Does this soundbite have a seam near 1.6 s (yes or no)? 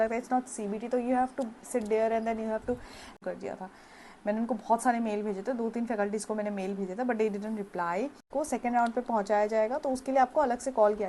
no